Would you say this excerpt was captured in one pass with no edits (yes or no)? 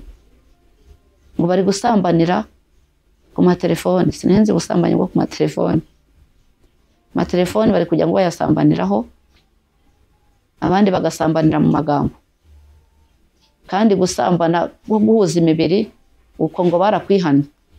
yes